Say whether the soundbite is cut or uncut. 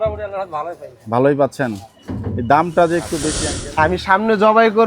cut